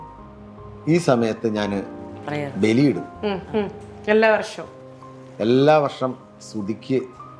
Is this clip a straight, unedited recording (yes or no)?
yes